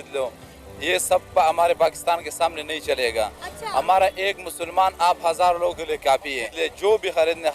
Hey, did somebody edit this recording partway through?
yes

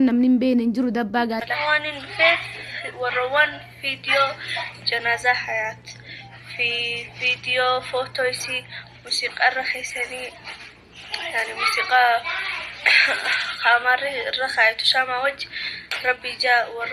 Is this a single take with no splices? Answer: no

